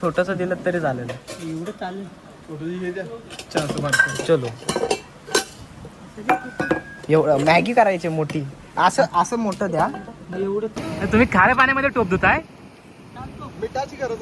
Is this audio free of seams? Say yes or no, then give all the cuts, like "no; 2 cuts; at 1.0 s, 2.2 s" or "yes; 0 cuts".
no; 1 cut; at 10.7 s